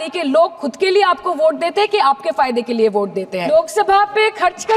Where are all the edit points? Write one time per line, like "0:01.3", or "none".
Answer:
0:03.5